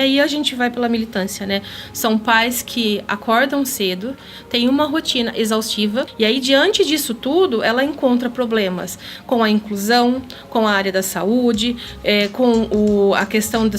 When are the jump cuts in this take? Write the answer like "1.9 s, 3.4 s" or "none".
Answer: 6.1 s